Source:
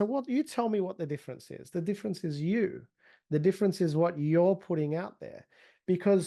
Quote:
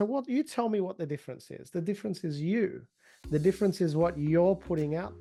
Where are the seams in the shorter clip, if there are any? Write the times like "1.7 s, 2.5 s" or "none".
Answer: none